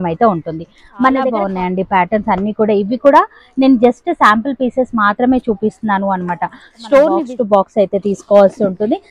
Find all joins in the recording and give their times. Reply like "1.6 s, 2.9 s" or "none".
1.3 s, 7.3 s